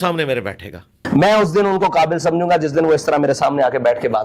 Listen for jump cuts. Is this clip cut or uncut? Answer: cut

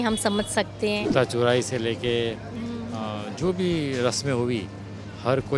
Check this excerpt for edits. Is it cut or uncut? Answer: cut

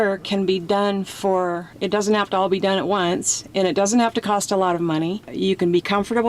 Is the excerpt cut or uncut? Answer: cut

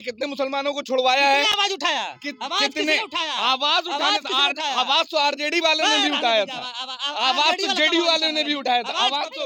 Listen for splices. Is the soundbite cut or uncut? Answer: uncut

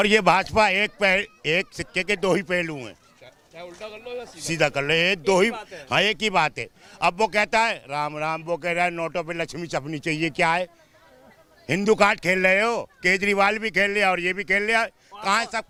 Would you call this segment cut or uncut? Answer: uncut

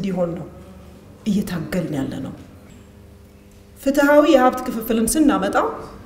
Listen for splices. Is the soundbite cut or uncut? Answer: cut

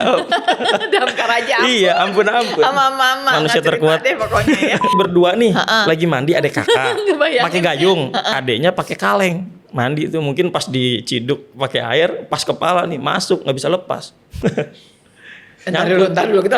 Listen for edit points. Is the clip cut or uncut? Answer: cut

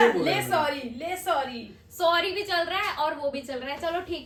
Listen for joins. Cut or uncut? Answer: uncut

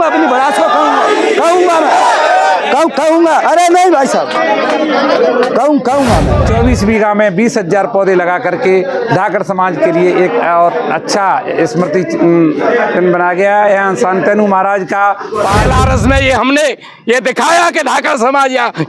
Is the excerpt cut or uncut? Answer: cut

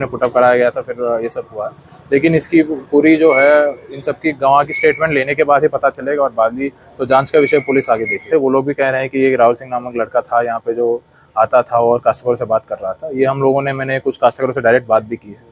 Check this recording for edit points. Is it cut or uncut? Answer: cut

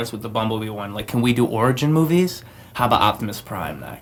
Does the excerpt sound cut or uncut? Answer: uncut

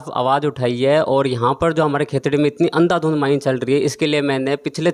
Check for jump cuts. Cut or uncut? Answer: uncut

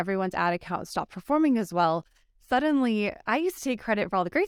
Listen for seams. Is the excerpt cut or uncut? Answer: uncut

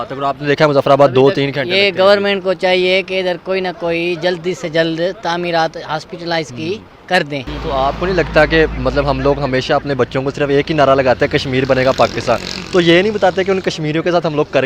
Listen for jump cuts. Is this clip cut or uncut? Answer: cut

